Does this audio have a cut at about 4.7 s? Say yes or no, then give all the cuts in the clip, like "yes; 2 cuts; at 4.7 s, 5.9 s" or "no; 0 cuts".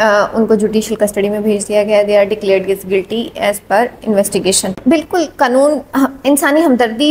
yes; 1 cut; at 4.7 s